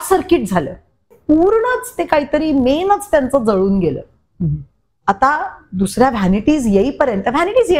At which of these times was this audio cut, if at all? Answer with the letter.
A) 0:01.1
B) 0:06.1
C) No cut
A